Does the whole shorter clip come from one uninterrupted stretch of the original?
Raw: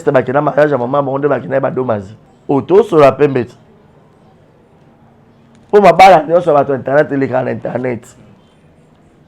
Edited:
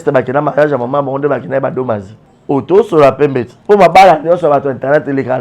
no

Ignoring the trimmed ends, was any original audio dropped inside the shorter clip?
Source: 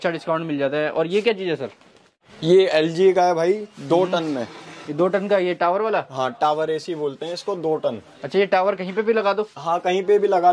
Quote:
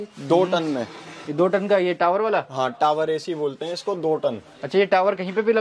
no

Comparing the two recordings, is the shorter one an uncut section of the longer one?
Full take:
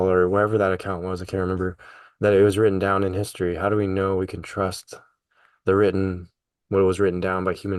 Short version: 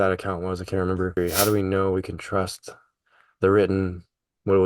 no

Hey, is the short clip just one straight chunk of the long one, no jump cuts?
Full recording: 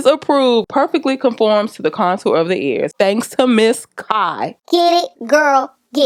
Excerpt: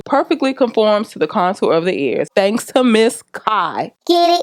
yes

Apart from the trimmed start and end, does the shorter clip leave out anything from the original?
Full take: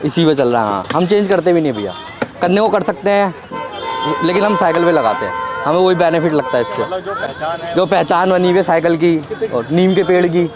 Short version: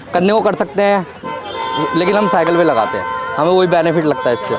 no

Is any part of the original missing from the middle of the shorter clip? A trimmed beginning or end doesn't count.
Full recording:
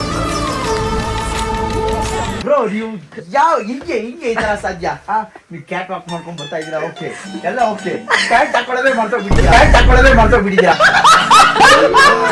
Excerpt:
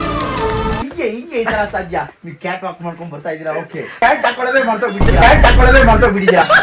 yes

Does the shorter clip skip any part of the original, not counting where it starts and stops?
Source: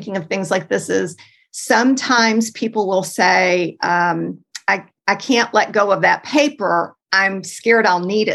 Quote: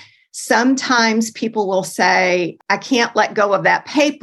yes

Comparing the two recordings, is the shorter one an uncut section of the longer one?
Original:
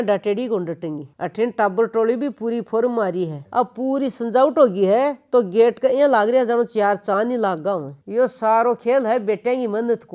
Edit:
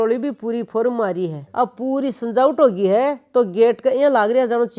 yes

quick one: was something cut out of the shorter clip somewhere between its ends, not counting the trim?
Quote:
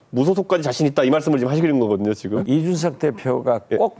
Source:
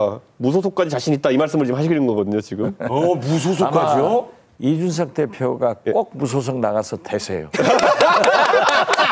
yes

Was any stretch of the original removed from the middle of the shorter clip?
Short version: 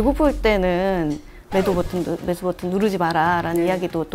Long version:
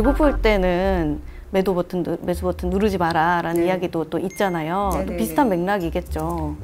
no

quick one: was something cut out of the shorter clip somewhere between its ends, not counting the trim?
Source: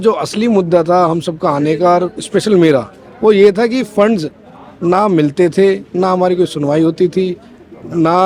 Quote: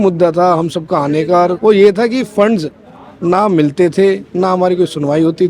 yes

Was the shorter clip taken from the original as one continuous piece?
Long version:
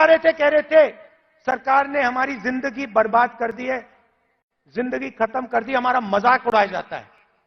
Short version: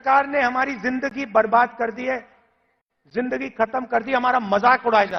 yes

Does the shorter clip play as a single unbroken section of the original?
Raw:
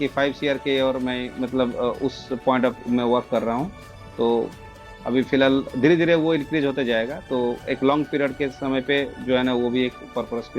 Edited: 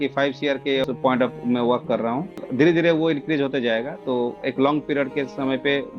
no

